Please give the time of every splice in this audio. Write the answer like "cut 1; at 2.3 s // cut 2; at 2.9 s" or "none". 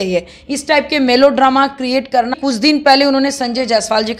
cut 1; at 2.3 s